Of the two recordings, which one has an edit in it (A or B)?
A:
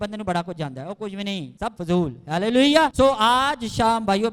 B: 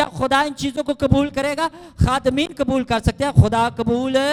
A